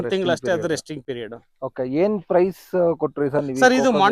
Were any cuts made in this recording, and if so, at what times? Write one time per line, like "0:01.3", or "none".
none